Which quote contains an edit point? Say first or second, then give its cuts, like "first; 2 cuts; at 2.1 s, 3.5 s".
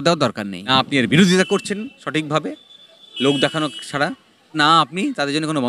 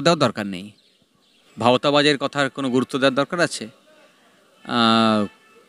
first; 2 cuts; at 0.7 s, 4.5 s